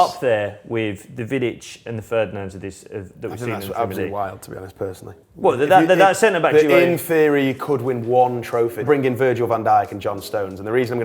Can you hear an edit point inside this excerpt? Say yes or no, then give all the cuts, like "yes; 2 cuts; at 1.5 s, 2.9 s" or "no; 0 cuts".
yes; 1 cut; at 8.8 s